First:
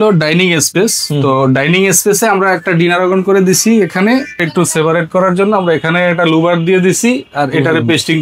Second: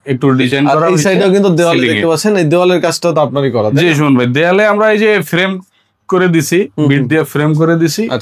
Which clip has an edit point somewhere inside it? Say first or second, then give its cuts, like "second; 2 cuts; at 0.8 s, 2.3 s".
first; 1 cut; at 4.5 s